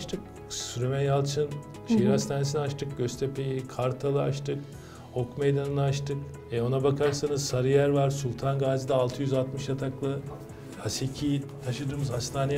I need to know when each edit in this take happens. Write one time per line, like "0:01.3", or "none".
none

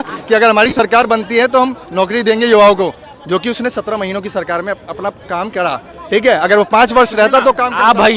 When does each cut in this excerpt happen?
none

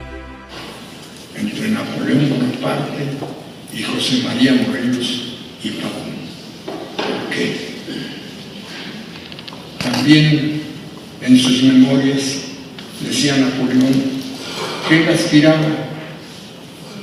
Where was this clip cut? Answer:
none

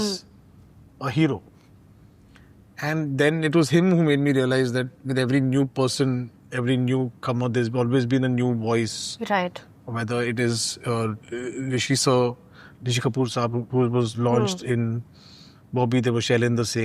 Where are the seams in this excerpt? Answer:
none

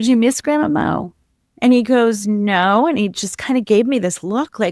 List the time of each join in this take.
none

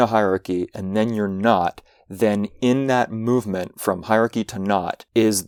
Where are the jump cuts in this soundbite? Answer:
none

